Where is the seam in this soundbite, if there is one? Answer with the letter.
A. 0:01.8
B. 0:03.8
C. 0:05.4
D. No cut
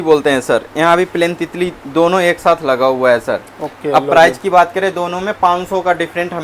D